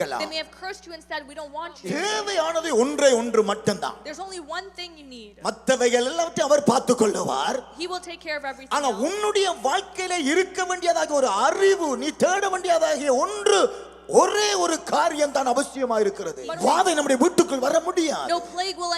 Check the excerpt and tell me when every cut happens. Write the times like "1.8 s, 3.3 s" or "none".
1.8 s, 16.4 s